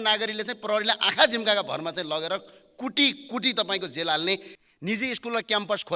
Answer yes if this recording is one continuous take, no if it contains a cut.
no